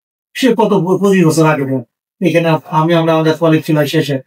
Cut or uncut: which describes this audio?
uncut